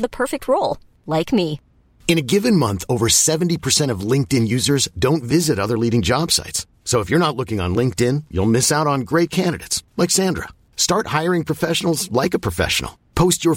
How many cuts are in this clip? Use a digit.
0